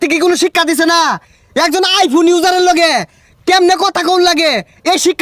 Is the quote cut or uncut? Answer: uncut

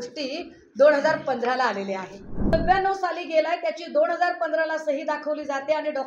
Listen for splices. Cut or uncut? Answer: cut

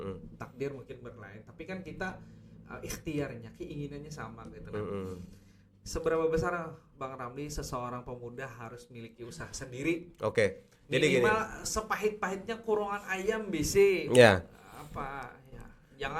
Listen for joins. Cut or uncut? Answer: uncut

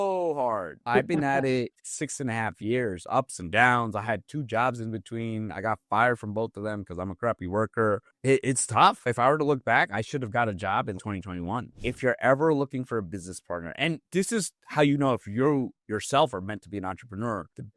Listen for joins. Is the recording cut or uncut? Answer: cut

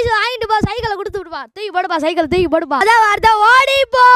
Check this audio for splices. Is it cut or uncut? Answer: cut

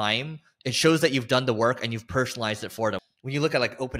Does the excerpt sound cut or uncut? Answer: cut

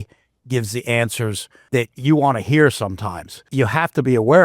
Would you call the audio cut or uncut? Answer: cut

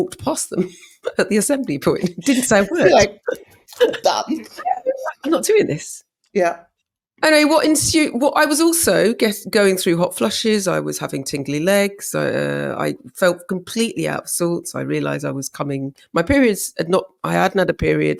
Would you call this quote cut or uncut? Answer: uncut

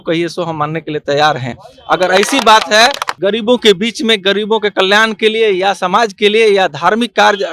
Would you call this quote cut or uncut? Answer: cut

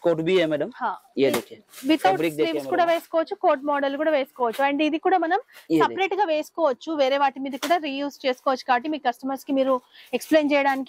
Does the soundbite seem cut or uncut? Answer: uncut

